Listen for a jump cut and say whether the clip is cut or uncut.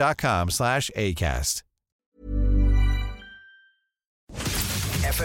cut